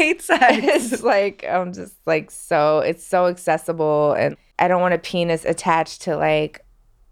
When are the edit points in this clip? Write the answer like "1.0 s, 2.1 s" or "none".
none

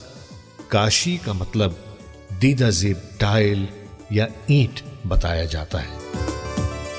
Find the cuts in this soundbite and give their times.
6.0 s

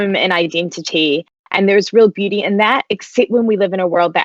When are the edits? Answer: none

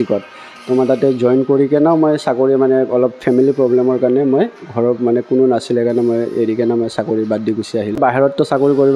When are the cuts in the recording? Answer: 8.0 s

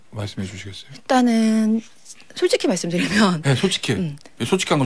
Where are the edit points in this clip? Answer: none

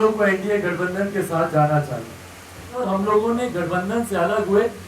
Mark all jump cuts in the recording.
2.8 s

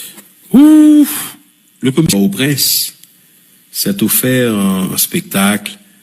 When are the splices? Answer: 2.1 s

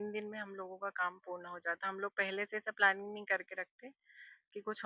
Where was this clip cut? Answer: none

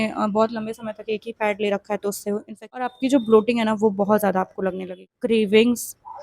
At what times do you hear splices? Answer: 2.9 s, 5.0 s

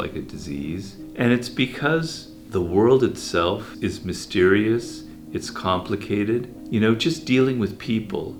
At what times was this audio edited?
none

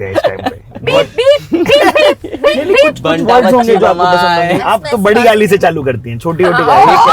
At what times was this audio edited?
4.6 s

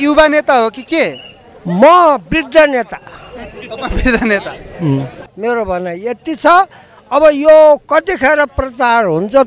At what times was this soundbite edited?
5.1 s

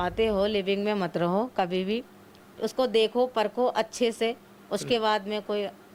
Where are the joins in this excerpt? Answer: none

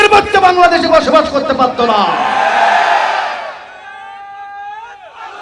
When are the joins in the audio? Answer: none

